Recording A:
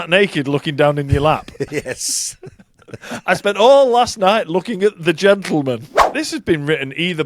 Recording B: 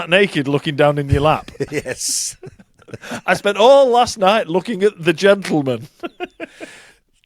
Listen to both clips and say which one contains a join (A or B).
A